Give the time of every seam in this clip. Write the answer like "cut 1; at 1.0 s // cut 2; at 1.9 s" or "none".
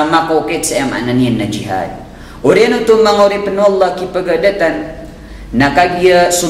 none